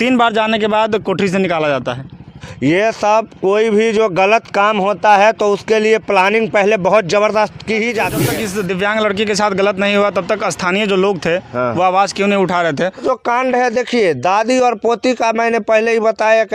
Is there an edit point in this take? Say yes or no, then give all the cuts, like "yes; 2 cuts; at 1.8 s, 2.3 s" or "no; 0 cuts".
yes; 3 cuts; at 2.4 s, 8.2 s, 13.0 s